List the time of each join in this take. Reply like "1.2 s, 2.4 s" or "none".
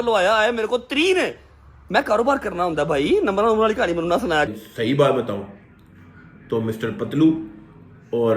4.5 s